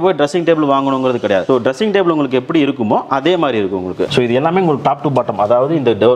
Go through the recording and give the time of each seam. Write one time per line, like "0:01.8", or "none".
0:01.4
0:04.1